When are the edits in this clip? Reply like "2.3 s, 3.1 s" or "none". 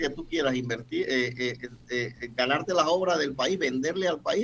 none